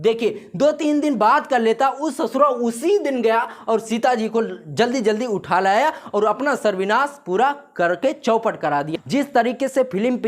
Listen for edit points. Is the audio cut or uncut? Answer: cut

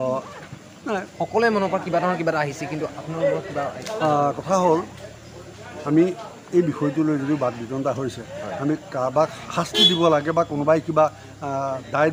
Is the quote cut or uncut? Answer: uncut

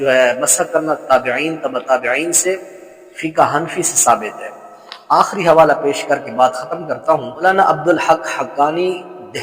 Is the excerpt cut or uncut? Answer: cut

